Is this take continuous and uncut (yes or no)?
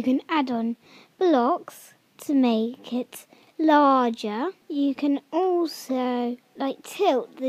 no